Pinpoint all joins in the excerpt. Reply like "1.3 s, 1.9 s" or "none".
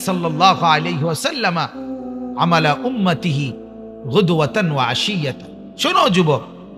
none